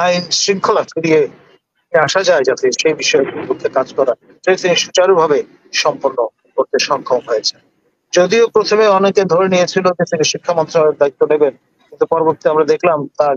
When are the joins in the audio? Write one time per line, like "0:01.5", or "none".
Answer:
none